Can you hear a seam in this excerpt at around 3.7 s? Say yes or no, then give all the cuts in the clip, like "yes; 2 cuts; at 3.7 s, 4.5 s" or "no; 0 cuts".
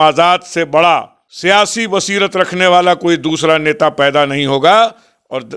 no; 1 cut; at 1.5 s